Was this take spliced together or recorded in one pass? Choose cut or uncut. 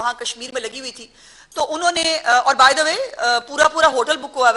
uncut